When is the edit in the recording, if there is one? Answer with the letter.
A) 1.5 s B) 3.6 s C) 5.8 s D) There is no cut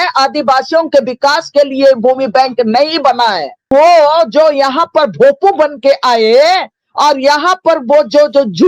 B